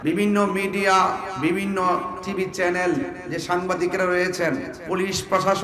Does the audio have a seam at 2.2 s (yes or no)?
yes